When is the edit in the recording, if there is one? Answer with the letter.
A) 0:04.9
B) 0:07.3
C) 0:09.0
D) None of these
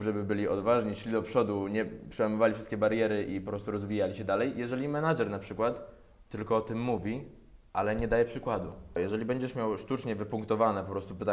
C